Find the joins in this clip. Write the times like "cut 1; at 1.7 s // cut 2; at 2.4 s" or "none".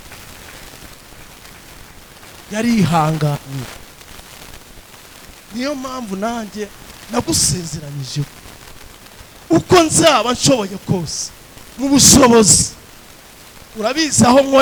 none